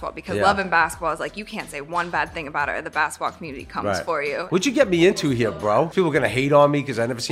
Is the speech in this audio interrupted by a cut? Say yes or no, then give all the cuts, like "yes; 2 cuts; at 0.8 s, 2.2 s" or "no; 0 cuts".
yes; 2 cuts; at 4.5 s, 5.9 s